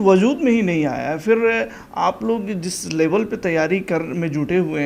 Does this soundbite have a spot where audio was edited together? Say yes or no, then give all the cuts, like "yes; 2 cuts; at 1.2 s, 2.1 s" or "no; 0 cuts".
no; 0 cuts